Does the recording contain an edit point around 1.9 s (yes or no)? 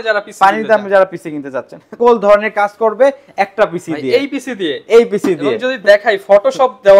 yes